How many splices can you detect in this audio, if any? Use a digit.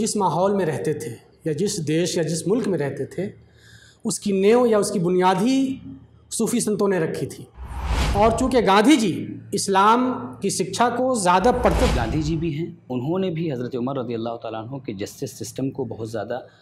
2